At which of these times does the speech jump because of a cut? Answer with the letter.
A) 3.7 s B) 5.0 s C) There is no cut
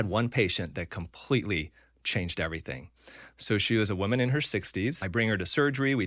B